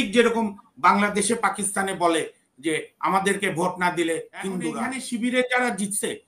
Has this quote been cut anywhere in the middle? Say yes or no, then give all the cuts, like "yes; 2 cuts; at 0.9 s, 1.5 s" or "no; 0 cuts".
yes; 1 cut; at 4.9 s